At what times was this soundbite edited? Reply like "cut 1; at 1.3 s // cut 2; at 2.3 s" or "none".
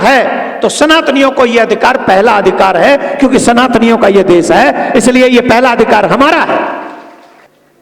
none